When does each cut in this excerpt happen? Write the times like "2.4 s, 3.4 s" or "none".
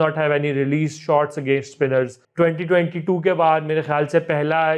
2.2 s